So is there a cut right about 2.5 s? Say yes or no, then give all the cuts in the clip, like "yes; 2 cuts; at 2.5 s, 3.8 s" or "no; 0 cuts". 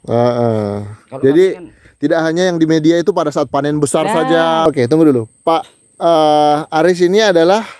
no; 1 cut; at 4.6 s